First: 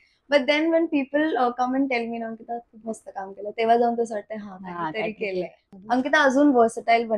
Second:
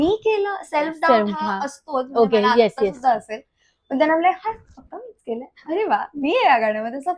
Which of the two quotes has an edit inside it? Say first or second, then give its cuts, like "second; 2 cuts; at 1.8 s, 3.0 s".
first; 1 cut; at 5.6 s